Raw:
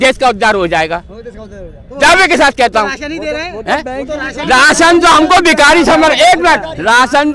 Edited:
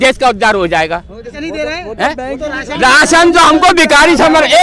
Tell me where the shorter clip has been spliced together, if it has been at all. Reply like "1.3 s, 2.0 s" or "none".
1.4 s